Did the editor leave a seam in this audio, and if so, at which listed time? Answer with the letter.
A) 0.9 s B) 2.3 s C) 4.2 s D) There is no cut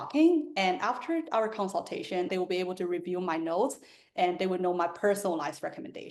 B